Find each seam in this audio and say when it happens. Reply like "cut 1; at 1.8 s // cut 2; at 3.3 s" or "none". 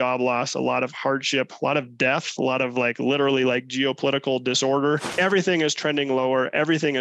cut 1; at 5.1 s